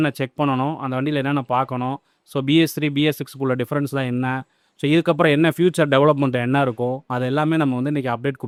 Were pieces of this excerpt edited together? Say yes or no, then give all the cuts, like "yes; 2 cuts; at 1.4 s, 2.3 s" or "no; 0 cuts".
no; 0 cuts